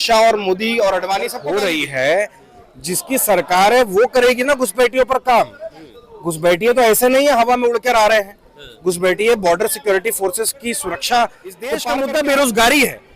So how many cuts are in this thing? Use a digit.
2